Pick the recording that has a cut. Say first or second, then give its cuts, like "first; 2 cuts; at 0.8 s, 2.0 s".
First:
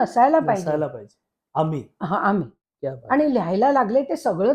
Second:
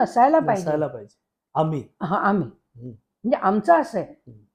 first; 1 cut; at 2.6 s